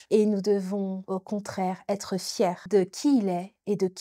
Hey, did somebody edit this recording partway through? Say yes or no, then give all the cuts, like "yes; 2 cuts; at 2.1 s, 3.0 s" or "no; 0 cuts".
no; 0 cuts